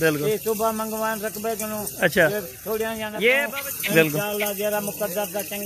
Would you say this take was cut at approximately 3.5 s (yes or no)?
yes